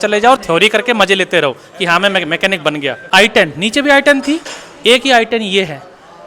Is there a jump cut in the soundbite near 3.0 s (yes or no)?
yes